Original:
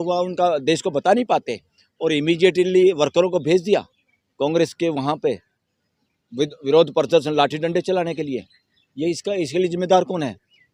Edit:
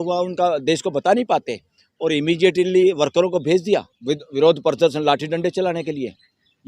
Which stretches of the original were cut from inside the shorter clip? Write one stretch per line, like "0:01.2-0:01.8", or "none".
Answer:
0:03.9-0:06.2